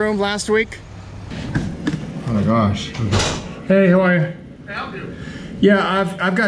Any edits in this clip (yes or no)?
yes